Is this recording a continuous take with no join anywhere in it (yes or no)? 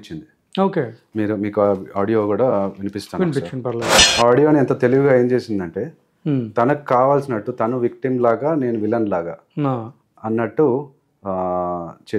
no